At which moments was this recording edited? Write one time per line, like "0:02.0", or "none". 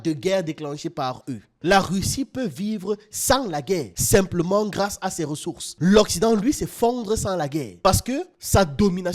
0:01.5